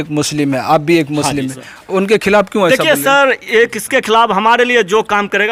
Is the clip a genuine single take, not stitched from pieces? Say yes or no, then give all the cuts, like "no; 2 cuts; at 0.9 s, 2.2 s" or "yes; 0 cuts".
yes; 0 cuts